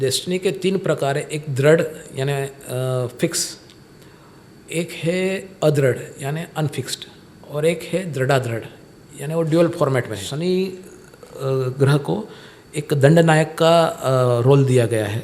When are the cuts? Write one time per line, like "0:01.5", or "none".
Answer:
0:10.3